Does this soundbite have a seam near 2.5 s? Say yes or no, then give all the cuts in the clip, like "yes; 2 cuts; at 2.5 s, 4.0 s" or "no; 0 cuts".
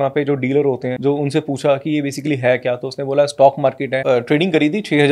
no; 2 cuts; at 0.9 s, 4.0 s